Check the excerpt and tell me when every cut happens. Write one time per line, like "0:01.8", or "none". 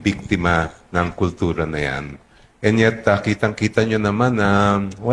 none